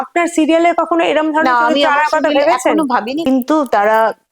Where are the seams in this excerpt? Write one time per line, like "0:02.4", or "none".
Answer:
0:03.3